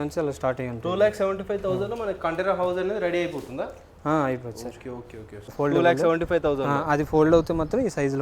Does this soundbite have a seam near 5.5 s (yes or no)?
yes